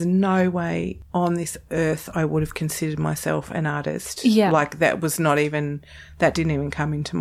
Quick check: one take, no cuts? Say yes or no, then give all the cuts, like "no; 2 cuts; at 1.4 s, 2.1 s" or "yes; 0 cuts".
no; 1 cut; at 1.0 s